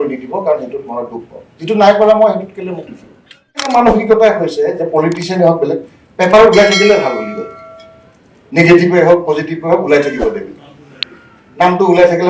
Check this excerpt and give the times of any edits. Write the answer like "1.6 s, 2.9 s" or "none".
3.7 s